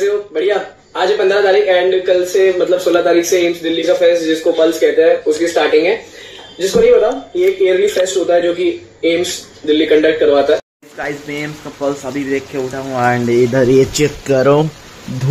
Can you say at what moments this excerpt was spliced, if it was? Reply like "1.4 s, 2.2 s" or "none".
none